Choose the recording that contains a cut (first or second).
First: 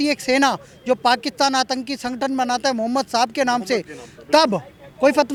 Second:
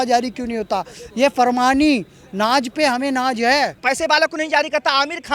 second